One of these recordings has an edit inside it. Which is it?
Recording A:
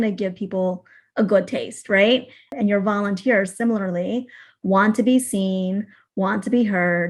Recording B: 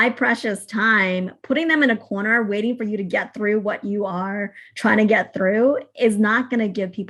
A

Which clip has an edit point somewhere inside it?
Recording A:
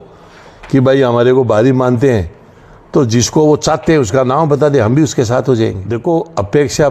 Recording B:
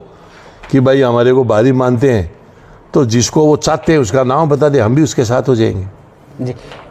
A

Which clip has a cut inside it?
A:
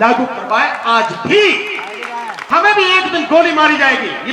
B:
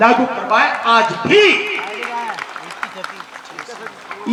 A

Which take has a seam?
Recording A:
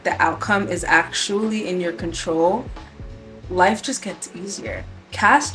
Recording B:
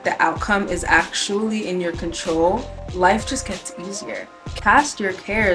B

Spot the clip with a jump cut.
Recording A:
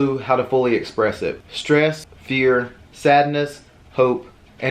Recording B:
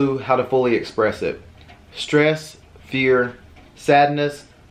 A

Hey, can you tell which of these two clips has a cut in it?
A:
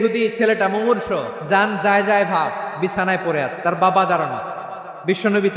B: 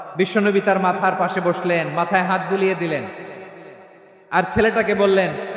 A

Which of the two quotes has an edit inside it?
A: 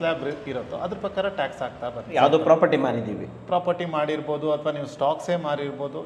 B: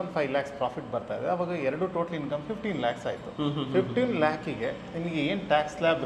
A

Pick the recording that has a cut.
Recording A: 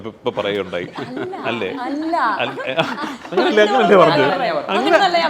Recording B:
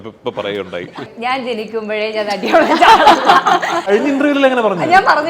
B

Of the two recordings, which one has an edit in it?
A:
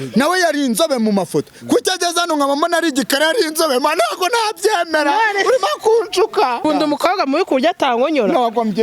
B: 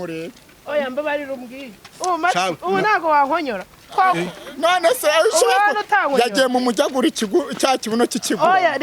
A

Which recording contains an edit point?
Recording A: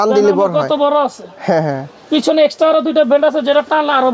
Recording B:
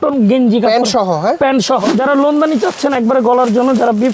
B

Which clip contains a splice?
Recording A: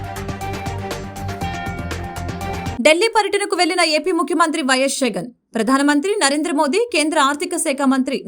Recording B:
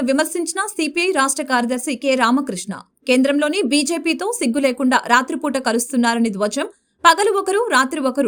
A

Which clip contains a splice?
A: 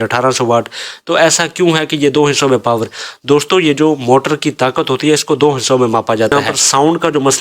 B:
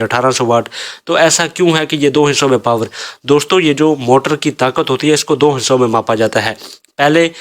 A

